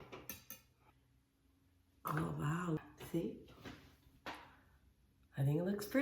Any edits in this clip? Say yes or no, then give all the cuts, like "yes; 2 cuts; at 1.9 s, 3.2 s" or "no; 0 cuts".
yes; 2 cuts; at 0.9 s, 2.8 s